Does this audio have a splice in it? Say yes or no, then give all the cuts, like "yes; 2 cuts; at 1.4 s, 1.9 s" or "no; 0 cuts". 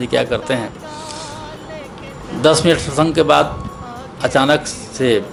no; 0 cuts